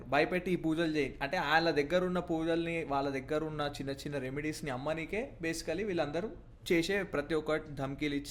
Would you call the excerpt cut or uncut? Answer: uncut